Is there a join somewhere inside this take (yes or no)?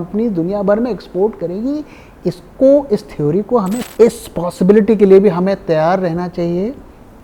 yes